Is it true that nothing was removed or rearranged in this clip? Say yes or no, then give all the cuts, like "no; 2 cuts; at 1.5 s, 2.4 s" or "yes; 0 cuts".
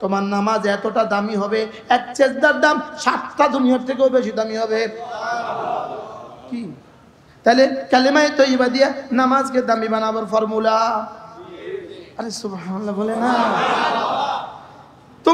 yes; 0 cuts